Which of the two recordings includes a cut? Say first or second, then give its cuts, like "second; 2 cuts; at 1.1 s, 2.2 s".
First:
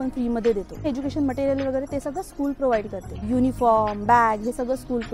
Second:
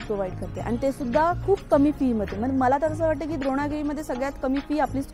first; 2 cuts; at 0.9 s, 3.2 s